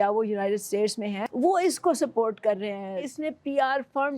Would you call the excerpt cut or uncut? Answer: cut